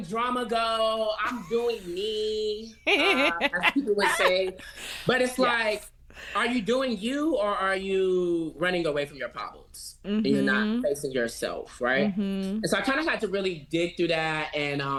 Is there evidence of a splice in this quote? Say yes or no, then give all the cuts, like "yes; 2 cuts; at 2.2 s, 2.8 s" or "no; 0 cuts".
no; 0 cuts